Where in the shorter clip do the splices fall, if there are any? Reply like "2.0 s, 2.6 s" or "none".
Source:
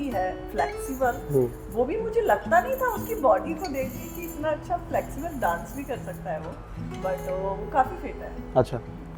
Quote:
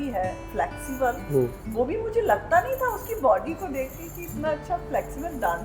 none